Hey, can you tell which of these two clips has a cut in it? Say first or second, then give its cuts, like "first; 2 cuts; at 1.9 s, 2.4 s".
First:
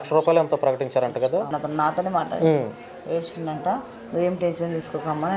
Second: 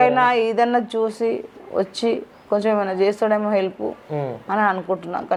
first; 1 cut; at 1.5 s